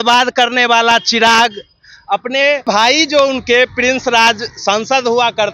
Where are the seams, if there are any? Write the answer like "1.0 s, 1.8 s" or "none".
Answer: 2.6 s

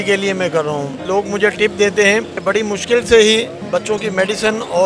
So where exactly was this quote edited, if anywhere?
1.0 s, 2.4 s, 3.6 s

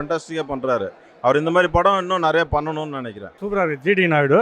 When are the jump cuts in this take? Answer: 3.3 s

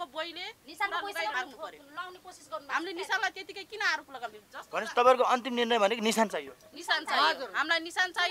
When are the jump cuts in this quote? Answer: 1.3 s

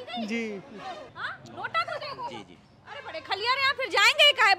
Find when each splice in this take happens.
1.2 s

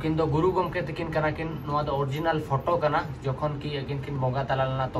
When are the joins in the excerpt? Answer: none

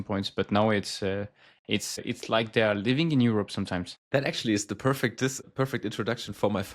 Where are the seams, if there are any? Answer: 2.0 s, 3.9 s, 5.4 s

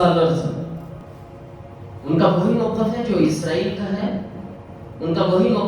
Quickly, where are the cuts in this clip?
1.0 s

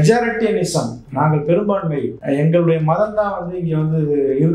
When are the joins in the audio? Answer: 2.2 s

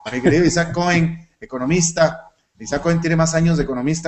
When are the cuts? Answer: 2.9 s

